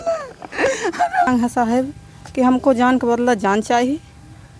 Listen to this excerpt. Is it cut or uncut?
cut